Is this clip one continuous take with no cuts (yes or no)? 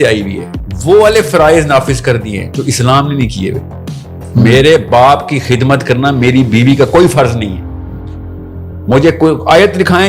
yes